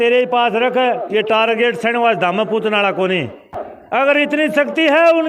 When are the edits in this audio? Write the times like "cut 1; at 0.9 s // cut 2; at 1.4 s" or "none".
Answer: cut 1; at 4.0 s